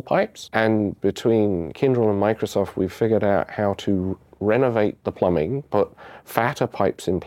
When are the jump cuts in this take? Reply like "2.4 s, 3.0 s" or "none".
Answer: 5.0 s